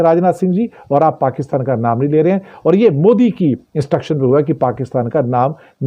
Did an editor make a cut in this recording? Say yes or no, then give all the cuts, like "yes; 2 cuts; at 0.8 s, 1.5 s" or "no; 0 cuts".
no; 0 cuts